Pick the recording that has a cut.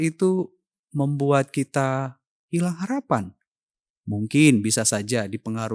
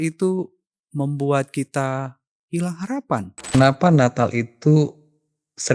second; 1 cut; at 3.5 s

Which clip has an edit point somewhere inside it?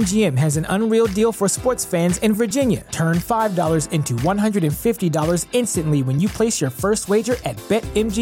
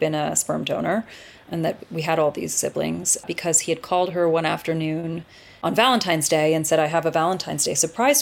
second; 3 cuts; at 1.5 s, 3.2 s, 5.6 s

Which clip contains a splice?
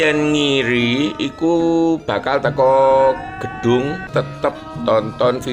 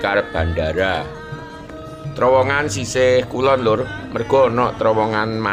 first; 1 cut; at 4.1 s

